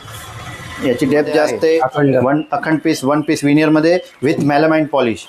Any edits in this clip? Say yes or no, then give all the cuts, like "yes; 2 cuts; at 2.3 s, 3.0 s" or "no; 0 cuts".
yes; 1 cut; at 1.8 s